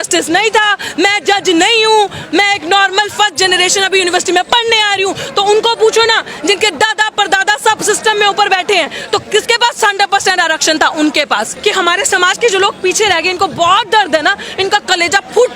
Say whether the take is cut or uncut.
cut